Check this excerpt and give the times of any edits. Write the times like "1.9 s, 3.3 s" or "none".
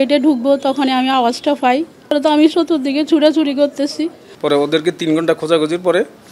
2.1 s, 4.3 s